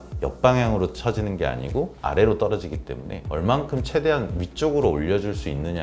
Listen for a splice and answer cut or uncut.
uncut